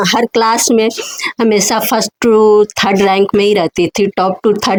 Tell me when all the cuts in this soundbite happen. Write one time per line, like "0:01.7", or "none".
none